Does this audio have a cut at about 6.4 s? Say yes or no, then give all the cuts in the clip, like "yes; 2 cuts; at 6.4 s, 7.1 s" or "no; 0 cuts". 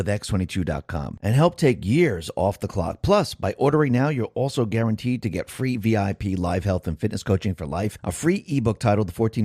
no; 0 cuts